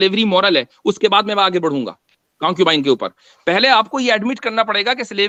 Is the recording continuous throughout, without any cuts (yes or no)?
yes